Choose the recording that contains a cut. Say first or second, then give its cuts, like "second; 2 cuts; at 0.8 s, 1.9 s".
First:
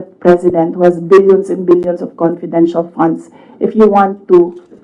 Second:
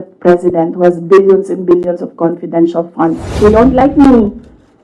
second; 1 cut; at 3.3 s